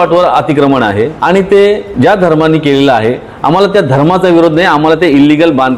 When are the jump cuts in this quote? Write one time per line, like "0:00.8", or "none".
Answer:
0:01.2
0:01.9